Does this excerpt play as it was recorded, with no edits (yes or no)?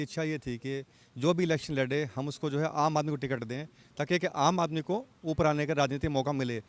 yes